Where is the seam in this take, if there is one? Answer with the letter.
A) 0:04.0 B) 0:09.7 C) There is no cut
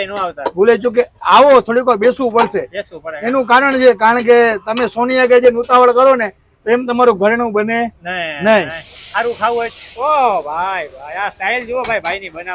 B